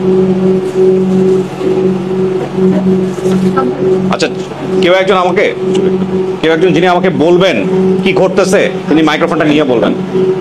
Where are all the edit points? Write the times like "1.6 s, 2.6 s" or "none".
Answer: none